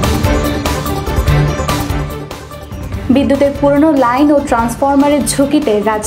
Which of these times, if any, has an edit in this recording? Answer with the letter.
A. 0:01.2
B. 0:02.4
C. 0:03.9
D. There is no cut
B